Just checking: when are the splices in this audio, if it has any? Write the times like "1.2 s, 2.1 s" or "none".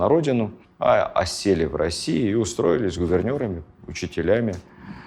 none